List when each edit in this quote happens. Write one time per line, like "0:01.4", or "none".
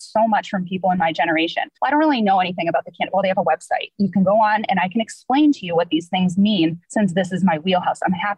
0:01.7
0:06.8